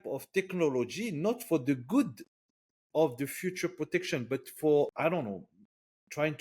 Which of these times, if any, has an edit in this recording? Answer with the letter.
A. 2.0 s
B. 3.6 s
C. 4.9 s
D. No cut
C